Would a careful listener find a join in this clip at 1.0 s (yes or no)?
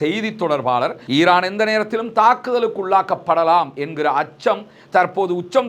yes